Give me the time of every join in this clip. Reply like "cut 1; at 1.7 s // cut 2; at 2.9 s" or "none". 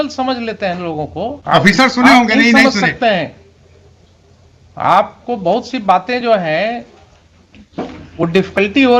cut 1; at 1.4 s